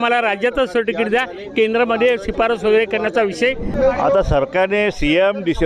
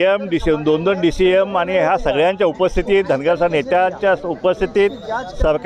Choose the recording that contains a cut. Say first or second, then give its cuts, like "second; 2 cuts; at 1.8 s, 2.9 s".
first; 1 cut; at 3.7 s